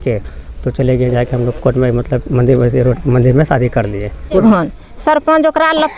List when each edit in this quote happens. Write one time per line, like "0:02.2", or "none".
0:04.4